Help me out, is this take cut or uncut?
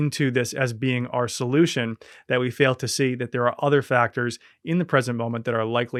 uncut